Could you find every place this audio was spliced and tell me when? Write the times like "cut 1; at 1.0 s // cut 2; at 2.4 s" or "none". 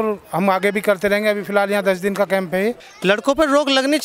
cut 1; at 2.9 s

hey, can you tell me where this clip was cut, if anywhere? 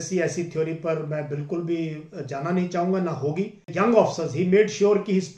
cut 1; at 3.7 s

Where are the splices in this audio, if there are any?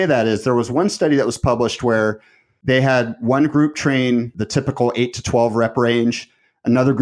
cut 1; at 4.4 s

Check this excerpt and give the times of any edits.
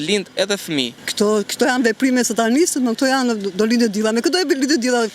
cut 1; at 1.0 s

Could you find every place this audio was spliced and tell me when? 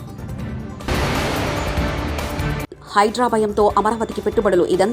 none

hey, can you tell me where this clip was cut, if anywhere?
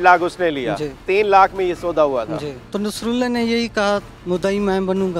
cut 1; at 0.9 s // cut 2; at 2.6 s // cut 3; at 4.1 s

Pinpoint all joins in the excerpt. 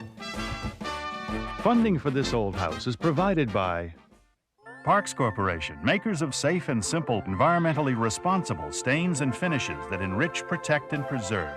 cut 1; at 1.6 s

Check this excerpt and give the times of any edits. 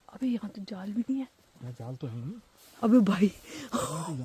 cut 1; at 2.6 s

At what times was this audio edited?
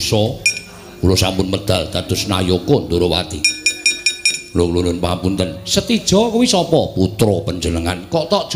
none

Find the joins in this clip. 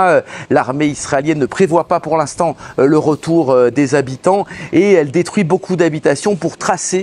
cut 1; at 4.6 s

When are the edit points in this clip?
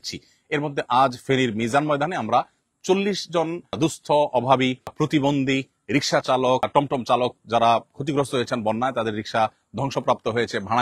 cut 1; at 3.8 s // cut 2; at 4.9 s // cut 3; at 6.7 s

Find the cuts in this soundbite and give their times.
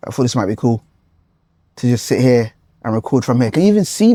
none

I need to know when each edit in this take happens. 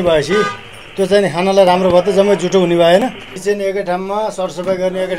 cut 1; at 3.3 s

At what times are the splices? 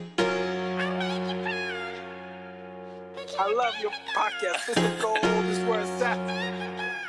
cut 1; at 2.3 s

